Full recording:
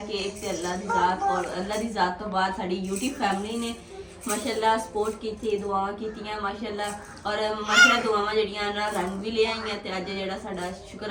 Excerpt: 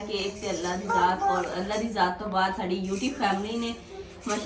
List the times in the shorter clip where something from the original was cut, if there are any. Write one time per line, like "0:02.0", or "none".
none